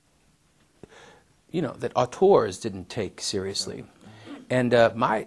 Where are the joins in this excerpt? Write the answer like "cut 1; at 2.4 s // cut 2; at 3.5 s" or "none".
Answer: cut 1; at 3.8 s

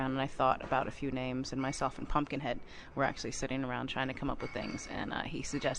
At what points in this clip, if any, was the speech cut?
cut 1; at 3.8 s

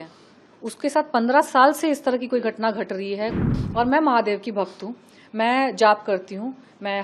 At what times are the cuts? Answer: cut 1; at 3.4 s

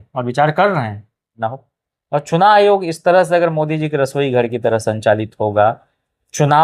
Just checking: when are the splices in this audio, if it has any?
cut 1; at 1.4 s

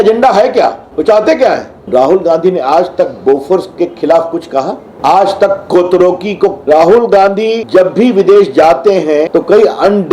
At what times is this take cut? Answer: cut 1; at 0.8 s // cut 2; at 1.7 s // cut 3; at 4.9 s // cut 4; at 6.6 s // cut 5; at 7.6 s // cut 6; at 9.3 s

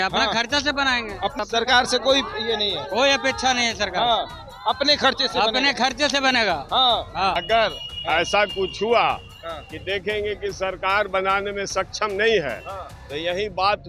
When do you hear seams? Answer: cut 1; at 1.3 s // cut 2; at 7.4 s

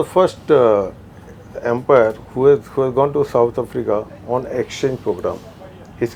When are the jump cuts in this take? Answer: none

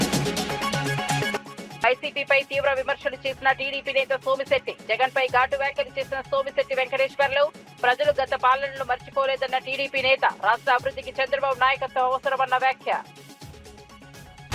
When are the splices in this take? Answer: cut 1; at 1.6 s

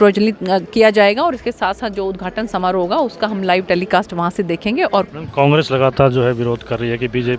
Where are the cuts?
cut 1; at 5.1 s

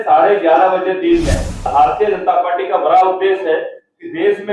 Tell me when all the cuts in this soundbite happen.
cut 1; at 1.7 s

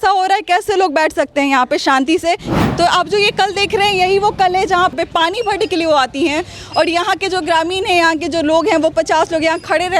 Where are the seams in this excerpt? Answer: cut 1; at 2.5 s // cut 2; at 4.9 s

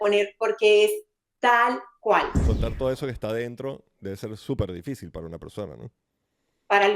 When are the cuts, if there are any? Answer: cut 1; at 2.4 s

